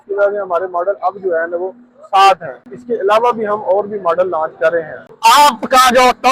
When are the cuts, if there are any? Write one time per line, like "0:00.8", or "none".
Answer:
none